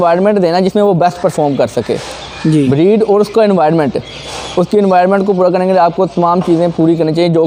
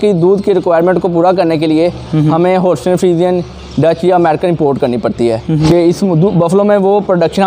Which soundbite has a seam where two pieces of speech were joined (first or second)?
second